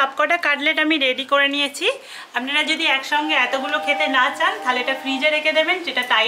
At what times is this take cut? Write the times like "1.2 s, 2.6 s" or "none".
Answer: none